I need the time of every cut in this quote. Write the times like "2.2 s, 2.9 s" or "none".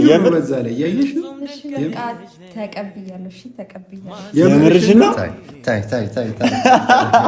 none